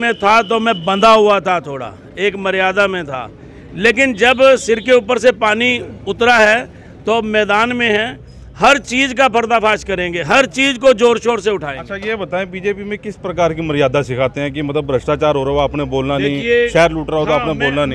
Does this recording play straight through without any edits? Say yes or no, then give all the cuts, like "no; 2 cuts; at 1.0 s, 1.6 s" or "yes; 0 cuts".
yes; 0 cuts